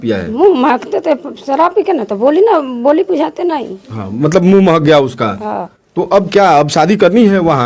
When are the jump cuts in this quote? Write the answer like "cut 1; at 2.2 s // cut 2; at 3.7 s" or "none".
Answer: none